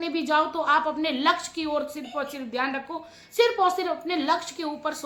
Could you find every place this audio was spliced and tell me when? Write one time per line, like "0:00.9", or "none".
none